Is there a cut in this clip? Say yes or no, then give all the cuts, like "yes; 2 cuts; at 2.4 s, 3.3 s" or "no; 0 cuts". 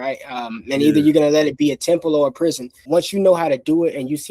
yes; 1 cut; at 2.8 s